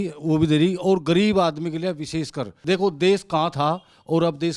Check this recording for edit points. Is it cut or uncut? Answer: uncut